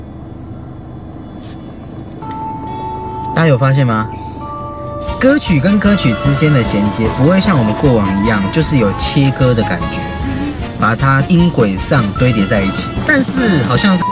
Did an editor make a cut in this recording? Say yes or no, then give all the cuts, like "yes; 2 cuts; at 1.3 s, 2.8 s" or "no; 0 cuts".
no; 0 cuts